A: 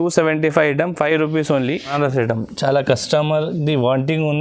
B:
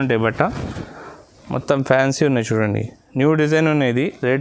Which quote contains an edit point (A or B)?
A